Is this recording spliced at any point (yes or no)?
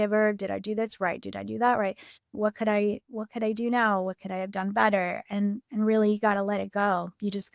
yes